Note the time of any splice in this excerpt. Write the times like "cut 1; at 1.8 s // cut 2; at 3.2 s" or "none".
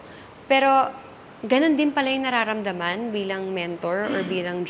none

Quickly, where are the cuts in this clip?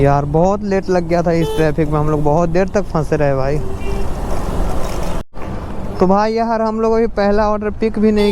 cut 1; at 5.2 s

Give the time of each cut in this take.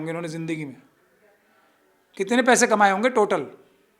none

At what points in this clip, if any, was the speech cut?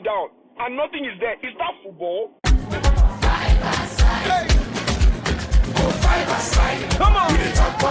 cut 1; at 2.4 s

